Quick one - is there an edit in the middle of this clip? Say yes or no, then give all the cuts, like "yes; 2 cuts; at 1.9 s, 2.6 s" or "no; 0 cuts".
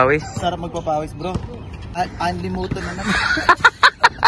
yes; 1 cut; at 1.9 s